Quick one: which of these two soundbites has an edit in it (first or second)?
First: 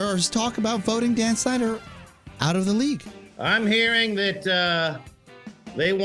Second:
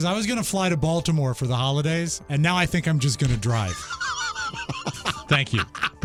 first